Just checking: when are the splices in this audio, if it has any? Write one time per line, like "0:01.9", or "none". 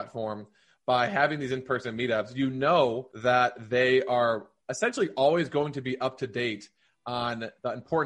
0:03.1